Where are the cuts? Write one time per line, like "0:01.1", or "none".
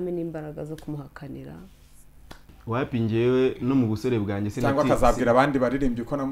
0:02.6